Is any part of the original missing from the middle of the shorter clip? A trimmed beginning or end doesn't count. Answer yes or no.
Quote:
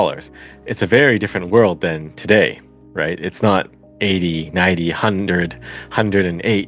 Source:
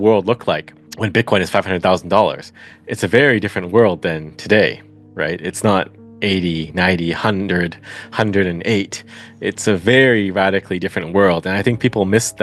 no